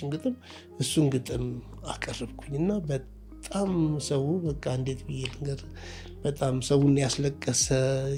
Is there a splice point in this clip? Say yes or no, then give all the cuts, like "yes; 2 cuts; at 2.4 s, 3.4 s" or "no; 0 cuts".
no; 0 cuts